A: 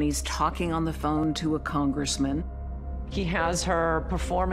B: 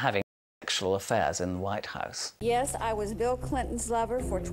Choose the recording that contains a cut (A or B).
B